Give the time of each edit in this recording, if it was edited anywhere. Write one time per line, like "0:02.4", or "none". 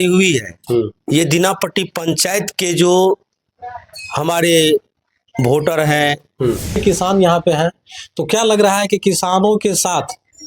0:06.8